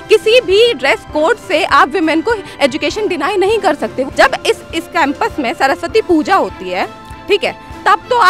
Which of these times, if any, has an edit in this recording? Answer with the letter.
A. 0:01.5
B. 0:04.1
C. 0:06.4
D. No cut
B